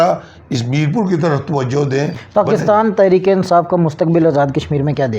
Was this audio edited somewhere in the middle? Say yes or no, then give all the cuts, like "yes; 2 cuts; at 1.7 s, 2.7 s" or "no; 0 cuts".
yes; 1 cut; at 2.2 s